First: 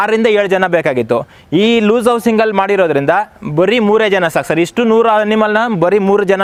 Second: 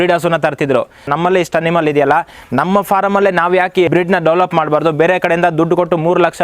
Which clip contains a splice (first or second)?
second